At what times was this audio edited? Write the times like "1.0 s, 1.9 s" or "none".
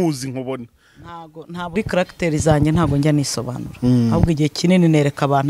1.7 s